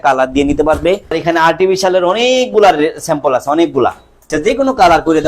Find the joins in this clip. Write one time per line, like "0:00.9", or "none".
0:01.2
0:04.2